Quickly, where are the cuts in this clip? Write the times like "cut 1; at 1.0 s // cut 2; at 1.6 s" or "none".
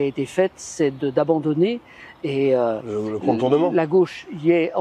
none